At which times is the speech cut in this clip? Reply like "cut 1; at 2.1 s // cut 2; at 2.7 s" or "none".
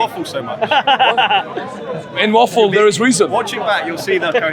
none

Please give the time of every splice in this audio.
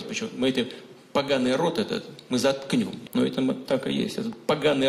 cut 1; at 3.0 s

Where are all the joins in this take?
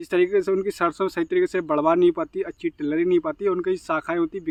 none

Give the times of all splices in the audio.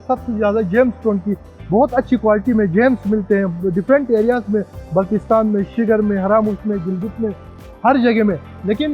none

